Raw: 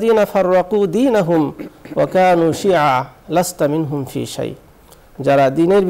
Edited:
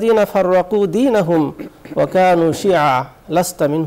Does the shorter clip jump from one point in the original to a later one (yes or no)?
no